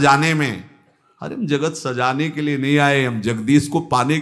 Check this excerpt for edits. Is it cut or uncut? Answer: uncut